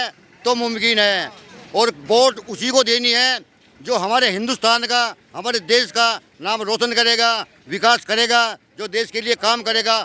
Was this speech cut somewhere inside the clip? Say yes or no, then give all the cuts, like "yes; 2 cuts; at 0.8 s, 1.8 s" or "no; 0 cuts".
no; 0 cuts